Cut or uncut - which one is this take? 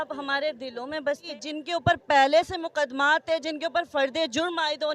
cut